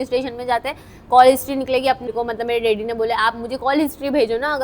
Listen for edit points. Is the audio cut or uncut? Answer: cut